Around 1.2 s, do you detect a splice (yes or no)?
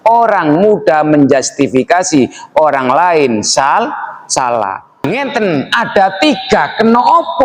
no